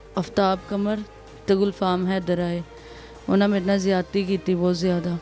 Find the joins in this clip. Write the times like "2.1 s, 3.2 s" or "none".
none